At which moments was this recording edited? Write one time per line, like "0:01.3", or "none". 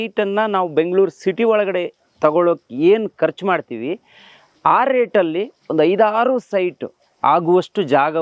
none